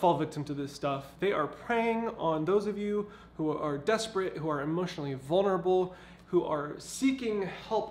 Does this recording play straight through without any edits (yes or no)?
yes